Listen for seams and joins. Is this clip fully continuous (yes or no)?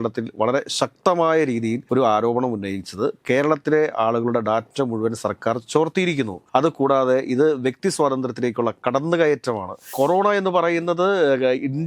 no